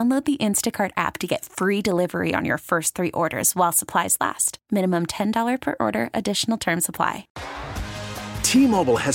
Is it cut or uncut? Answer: cut